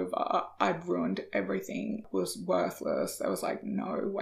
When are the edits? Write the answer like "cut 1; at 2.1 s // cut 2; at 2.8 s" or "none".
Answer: cut 1; at 2.0 s